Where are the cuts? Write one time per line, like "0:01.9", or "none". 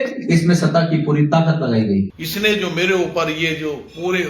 0:02.2